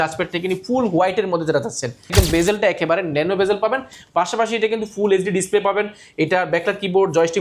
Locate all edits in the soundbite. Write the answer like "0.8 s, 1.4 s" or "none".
2.1 s